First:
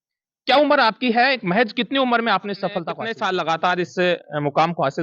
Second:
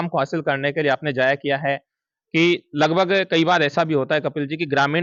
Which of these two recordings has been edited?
first; 1 cut; at 3.0 s

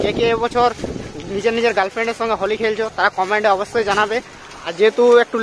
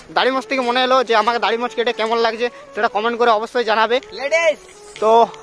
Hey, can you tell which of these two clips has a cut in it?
first; 1 cut; at 4.3 s

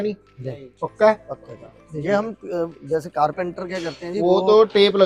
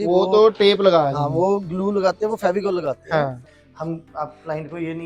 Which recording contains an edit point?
second; 1 cut; at 3.5 s

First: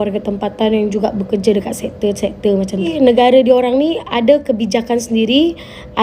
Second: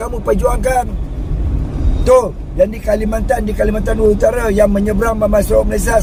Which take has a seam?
first; 1 cut; at 2.9 s

